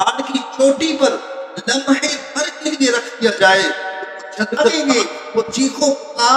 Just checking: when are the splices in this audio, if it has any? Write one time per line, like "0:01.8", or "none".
0:04.7